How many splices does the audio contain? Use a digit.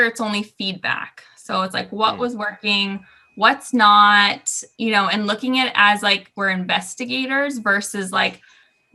0